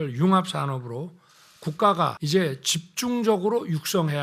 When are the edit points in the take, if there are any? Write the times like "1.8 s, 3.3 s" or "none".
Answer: 2.2 s